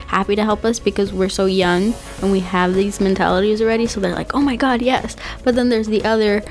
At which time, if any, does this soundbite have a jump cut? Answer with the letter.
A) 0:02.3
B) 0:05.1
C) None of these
C